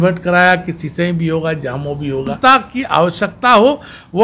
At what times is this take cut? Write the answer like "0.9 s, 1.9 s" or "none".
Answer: 2.3 s